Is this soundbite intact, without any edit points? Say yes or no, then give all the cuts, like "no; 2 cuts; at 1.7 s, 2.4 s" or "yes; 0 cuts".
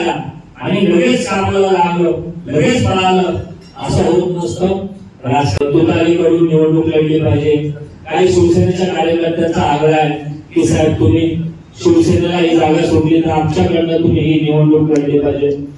no; 1 cut; at 5.6 s